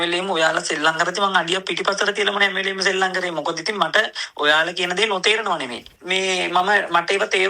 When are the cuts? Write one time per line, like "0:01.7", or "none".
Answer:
0:05.8